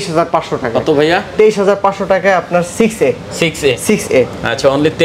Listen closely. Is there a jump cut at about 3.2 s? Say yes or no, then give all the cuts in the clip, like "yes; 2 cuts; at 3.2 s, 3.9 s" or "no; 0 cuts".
no; 0 cuts